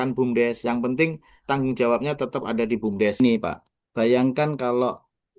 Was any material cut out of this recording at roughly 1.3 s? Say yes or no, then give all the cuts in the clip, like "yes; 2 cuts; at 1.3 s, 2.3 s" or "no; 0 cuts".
no; 1 cut; at 3.2 s